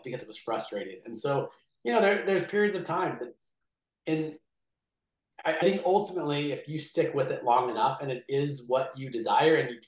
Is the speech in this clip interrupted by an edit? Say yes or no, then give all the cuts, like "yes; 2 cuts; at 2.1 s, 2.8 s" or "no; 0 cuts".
no; 0 cuts